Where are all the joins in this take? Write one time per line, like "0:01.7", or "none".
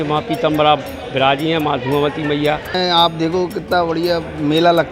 0:02.7